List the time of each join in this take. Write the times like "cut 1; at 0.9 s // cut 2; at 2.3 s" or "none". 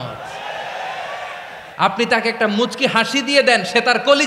cut 1; at 1.7 s